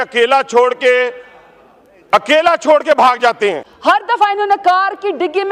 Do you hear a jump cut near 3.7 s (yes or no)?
yes